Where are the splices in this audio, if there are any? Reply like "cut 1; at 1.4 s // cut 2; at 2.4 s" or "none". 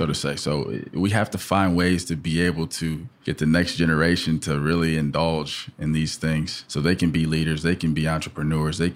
cut 1; at 3.1 s // cut 2; at 6.6 s